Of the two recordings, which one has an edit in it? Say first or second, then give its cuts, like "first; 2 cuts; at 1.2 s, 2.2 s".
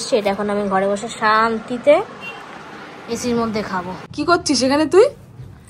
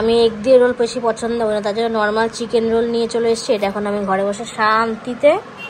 first; 1 cut; at 4.1 s